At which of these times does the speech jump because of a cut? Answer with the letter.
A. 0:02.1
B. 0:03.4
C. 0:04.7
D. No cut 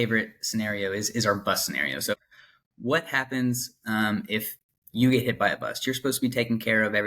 A